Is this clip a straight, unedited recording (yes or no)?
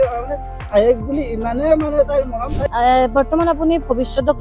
no